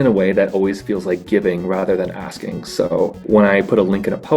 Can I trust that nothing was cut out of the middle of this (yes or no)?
no